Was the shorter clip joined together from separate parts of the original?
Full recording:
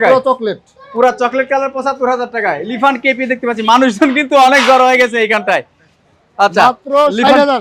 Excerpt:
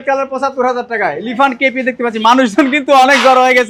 no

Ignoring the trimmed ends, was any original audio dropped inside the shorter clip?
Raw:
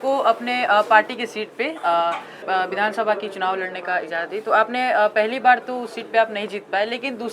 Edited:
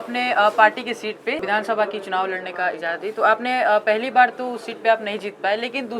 yes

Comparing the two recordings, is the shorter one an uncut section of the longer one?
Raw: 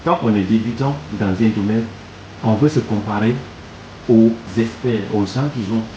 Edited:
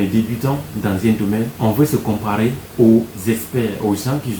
no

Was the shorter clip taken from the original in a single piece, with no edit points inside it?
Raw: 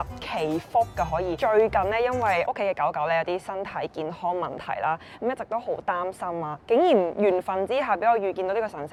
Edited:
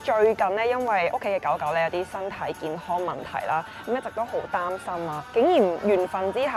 yes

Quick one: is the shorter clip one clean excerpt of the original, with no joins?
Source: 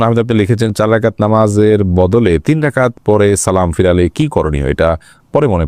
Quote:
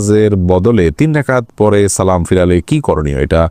yes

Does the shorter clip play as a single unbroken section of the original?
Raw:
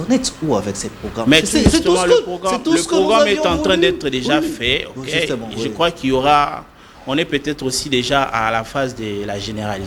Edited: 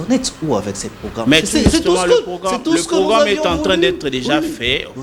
yes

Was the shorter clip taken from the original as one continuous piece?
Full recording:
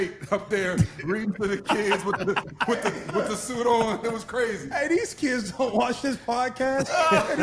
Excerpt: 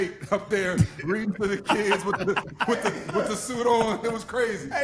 yes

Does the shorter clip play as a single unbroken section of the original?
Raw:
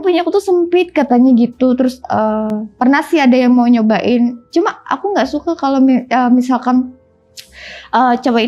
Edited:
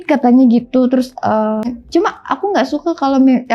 no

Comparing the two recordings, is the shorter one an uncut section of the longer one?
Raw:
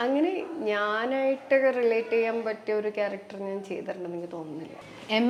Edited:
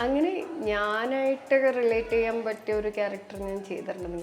yes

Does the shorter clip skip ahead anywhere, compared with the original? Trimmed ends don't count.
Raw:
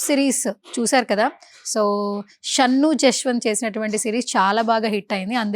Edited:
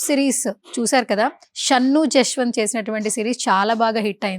yes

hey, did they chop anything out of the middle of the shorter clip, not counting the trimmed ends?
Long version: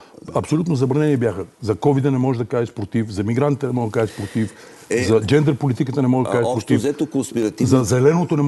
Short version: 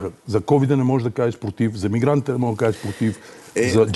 no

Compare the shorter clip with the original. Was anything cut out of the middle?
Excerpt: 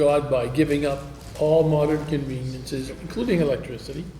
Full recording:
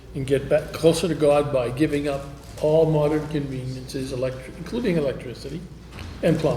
yes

